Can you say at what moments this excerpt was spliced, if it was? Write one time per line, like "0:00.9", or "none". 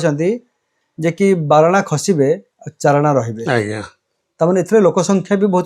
none